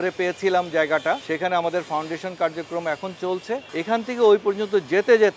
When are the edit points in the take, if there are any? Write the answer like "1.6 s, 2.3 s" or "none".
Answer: 1.2 s, 3.7 s